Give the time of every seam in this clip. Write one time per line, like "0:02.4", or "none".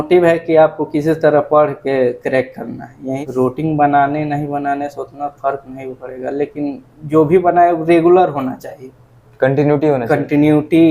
0:03.2